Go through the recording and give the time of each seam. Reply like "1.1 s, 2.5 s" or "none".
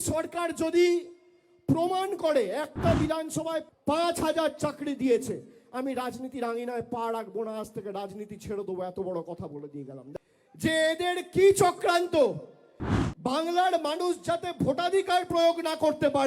3.7 s, 10.0 s